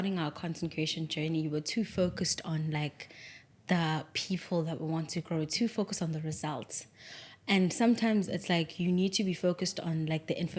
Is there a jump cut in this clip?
no; 0 cuts

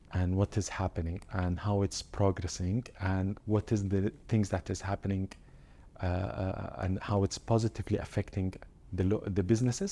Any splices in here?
no; 0 cuts

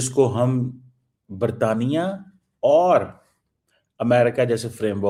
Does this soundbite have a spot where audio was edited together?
no; 0 cuts

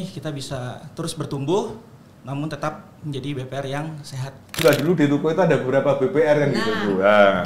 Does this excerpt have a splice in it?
yes; 1 cut; at 4.6 s

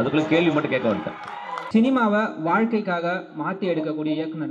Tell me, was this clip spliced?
yes; 1 cut; at 1.6 s

